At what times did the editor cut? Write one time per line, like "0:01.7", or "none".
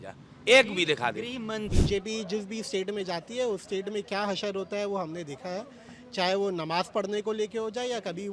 0:01.7